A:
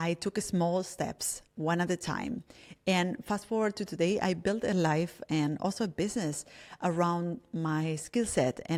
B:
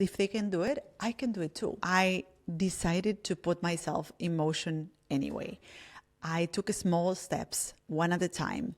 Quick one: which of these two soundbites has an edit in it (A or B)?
B